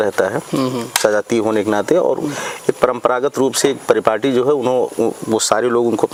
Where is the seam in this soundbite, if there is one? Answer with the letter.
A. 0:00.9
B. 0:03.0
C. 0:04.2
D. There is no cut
D